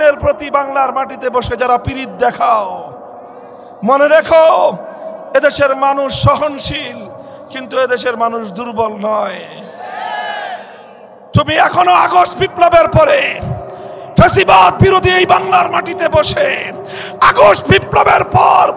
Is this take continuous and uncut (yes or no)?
yes